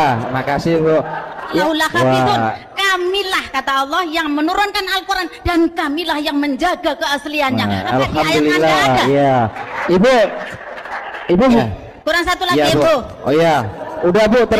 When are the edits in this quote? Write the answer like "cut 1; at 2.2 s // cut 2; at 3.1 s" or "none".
cut 1; at 1.6 s // cut 2; at 11.6 s